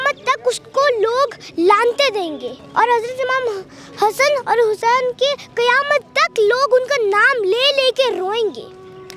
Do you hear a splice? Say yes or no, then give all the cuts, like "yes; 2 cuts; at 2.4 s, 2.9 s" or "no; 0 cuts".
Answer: yes; 1 cut; at 2.5 s